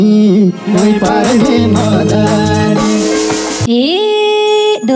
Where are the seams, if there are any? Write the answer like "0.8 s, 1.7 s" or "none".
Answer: 3.6 s